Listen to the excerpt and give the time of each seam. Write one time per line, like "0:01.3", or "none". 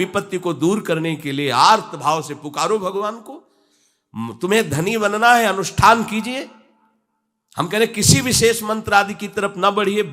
none